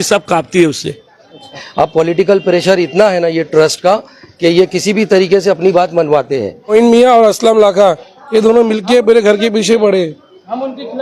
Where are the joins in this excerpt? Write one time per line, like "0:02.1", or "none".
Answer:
0:01.6
0:06.7